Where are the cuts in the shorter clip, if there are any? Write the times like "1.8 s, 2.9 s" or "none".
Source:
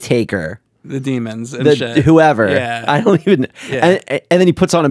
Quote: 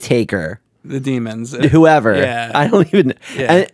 1.6 s